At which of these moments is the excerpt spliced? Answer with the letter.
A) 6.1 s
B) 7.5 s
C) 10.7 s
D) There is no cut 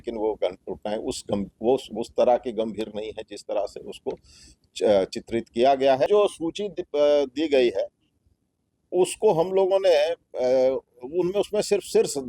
A